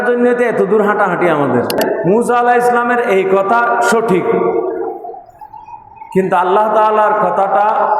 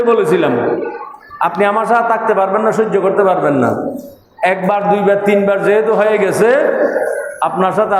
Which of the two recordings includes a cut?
first; 1 cut; at 1.9 s

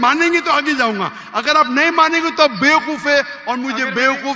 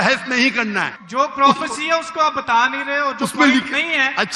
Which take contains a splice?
second; 1 cut; at 0.9 s

